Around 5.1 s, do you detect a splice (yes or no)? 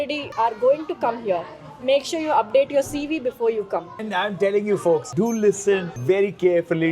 yes